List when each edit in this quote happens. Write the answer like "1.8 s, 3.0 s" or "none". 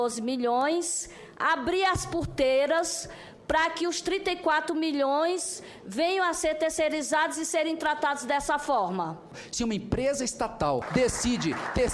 9.2 s, 10.9 s